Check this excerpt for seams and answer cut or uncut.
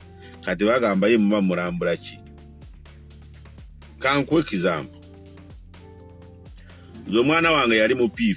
cut